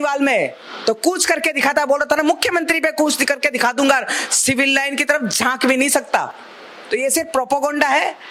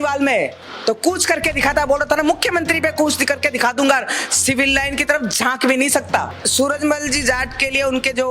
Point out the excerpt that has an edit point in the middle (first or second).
second